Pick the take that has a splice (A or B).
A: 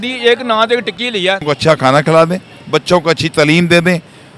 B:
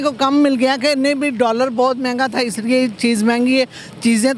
A